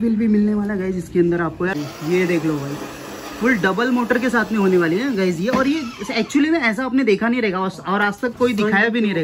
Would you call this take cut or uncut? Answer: cut